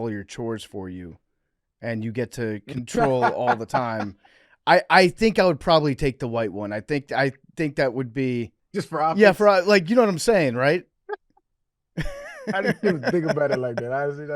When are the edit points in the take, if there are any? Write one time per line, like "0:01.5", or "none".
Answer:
0:08.6
0:10.9